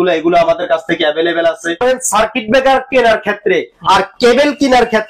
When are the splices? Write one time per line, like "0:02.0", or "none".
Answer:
0:01.8